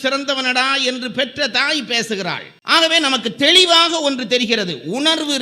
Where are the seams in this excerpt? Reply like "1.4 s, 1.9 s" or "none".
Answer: none